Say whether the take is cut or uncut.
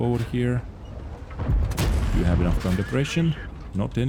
uncut